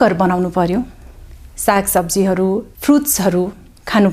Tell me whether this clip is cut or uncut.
cut